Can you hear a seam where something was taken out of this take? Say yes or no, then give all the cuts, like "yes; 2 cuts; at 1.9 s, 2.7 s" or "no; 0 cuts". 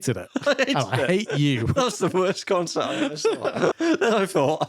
yes; 1 cut; at 3.8 s